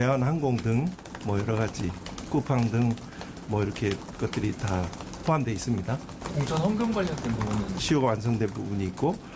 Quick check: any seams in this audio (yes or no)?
yes